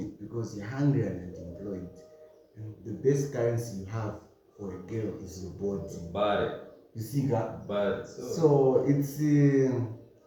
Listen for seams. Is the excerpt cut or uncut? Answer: uncut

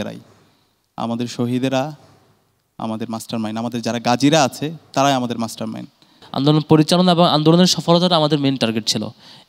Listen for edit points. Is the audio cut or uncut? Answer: cut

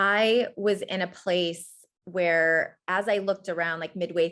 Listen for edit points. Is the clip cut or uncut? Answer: uncut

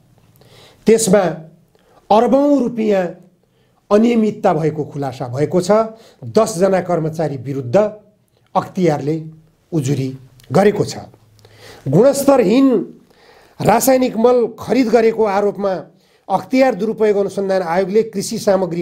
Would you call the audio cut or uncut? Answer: uncut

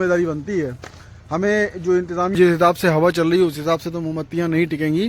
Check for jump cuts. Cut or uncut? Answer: cut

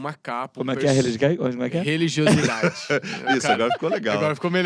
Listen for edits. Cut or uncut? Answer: cut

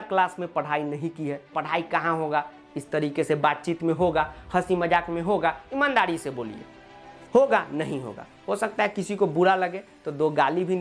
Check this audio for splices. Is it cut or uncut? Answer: cut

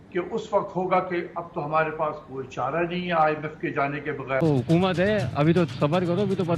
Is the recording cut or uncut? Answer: cut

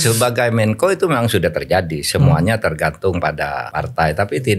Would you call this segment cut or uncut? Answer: cut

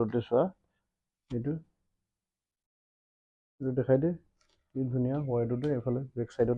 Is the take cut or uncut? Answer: uncut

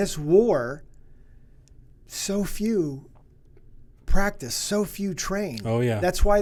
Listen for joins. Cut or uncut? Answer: uncut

